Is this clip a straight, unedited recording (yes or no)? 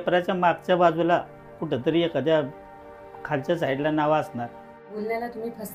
no